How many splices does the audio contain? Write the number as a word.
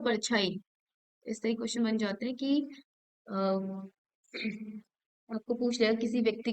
zero